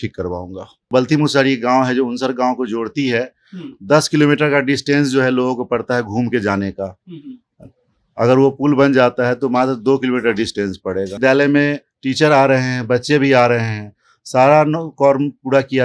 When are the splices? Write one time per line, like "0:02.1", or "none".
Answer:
0:00.9
0:11.2